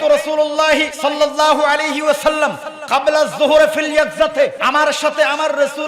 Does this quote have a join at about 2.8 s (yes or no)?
no